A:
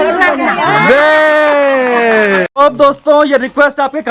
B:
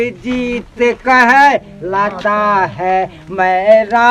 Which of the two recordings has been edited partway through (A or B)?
A